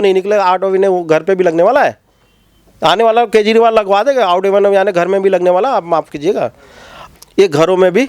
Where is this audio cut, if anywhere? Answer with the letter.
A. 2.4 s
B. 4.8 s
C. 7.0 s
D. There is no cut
C